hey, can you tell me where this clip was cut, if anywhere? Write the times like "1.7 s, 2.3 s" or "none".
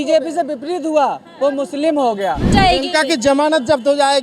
2.5 s